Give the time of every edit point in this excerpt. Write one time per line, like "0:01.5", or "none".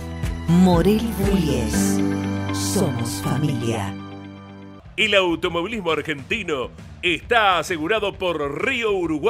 none